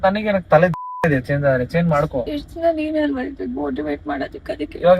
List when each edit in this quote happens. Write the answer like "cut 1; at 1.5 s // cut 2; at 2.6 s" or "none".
cut 1; at 2.3 s